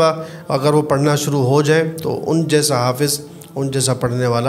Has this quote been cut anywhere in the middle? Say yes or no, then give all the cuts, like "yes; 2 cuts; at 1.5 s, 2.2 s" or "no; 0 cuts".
no; 0 cuts